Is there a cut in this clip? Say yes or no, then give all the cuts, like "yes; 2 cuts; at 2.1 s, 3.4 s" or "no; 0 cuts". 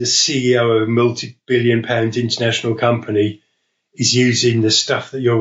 no; 0 cuts